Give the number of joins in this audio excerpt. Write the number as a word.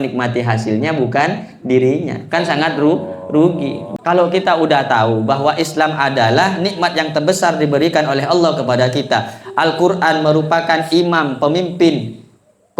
one